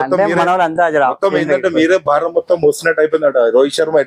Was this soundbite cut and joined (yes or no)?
no